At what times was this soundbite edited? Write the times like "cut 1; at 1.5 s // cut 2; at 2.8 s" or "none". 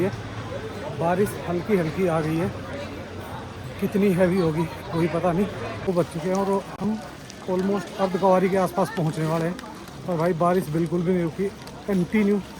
cut 1; at 5.8 s

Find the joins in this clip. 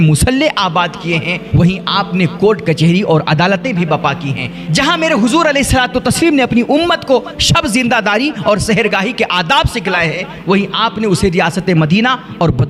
none

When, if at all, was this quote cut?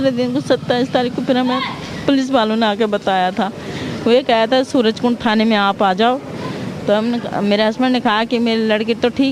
none

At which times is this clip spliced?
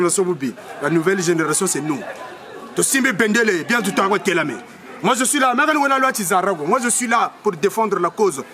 none

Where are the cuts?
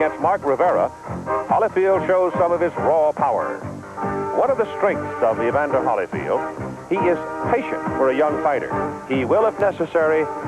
cut 1; at 5.2 s

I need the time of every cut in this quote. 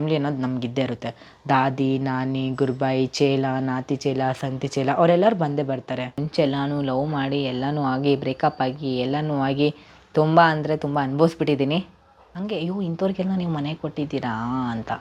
cut 1; at 6.2 s // cut 2; at 12.3 s

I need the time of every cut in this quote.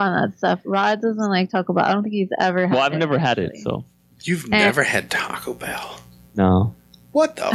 none

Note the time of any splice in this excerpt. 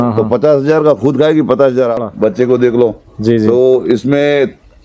cut 1; at 2.0 s

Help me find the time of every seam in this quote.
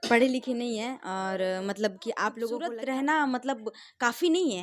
cut 1; at 2.6 s

